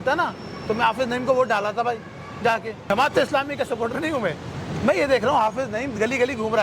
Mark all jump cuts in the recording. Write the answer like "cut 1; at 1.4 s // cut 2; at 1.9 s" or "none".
cut 1; at 2.9 s